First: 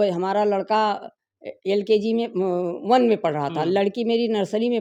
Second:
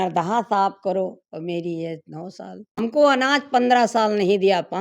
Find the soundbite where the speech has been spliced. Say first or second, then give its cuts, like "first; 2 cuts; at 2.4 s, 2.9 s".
second; 1 cut; at 2.7 s